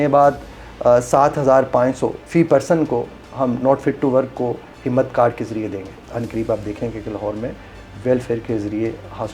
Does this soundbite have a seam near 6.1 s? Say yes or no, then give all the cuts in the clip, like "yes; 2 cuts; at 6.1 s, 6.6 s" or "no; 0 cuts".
yes; 2 cuts; at 2.2 s, 6.1 s